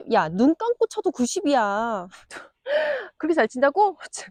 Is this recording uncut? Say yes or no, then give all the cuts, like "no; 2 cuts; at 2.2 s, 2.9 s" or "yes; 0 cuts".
yes; 0 cuts